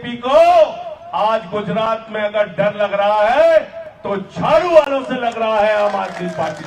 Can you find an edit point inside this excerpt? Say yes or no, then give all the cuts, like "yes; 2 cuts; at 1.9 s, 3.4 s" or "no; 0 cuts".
no; 0 cuts